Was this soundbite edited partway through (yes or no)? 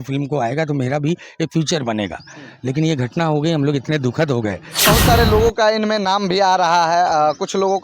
yes